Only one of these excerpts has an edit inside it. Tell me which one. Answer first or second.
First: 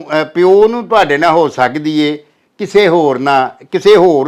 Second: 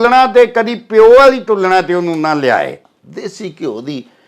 second